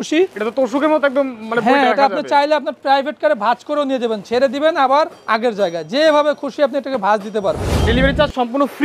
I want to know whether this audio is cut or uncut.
cut